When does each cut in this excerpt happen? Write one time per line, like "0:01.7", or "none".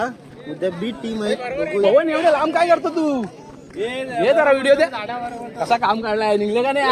none